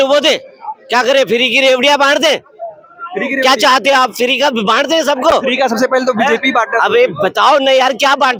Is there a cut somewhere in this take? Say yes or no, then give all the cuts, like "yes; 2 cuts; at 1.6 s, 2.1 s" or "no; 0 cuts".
no; 0 cuts